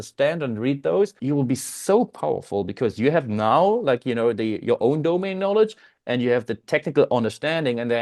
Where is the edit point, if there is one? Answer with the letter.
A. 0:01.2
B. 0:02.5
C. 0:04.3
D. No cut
A